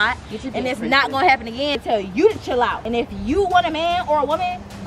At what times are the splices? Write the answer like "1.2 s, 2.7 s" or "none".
1.8 s, 2.8 s